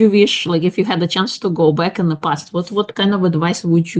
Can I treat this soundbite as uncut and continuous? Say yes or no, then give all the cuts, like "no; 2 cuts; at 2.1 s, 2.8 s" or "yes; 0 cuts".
yes; 0 cuts